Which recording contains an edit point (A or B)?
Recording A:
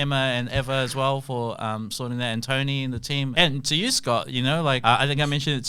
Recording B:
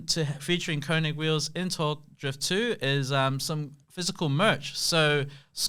A